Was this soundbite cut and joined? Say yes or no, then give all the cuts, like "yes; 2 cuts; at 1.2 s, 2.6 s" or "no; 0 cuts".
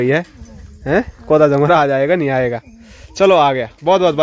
no; 0 cuts